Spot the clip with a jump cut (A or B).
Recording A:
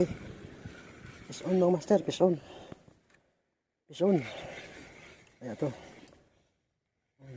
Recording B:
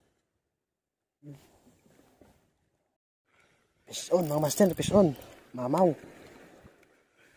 B